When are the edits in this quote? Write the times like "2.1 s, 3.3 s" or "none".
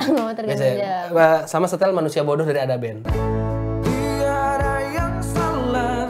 none